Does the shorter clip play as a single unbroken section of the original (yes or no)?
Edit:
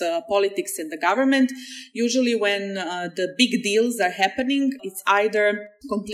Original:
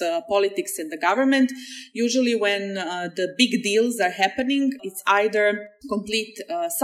yes